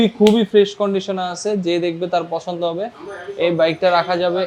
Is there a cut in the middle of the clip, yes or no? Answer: no